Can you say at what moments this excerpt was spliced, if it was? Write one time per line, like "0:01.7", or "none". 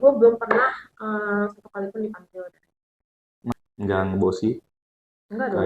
0:03.5

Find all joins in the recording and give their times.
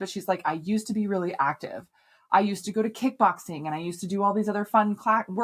none

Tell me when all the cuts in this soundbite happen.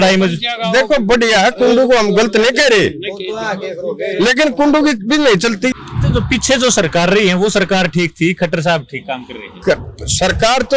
0:05.9

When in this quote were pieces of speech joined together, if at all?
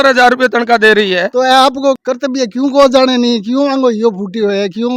0:01.3

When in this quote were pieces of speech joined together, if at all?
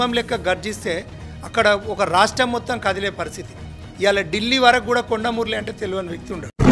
none

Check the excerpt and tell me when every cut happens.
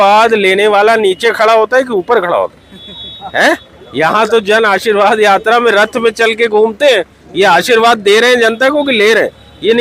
none

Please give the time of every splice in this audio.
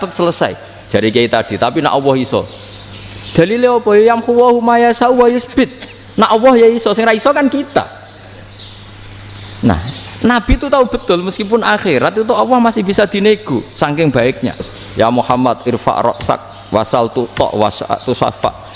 0:14.8

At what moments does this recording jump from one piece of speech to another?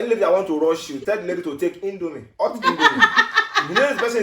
0:01.0

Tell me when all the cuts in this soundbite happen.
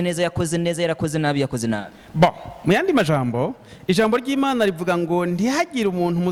none

